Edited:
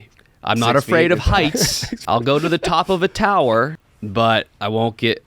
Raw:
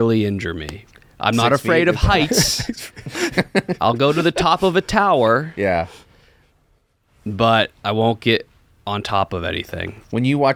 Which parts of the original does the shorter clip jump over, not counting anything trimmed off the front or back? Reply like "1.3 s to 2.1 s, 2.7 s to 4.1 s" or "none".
2.8 s to 3.7 s, 5.5 s to 7.0 s